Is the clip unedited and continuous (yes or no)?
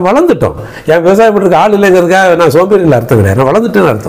yes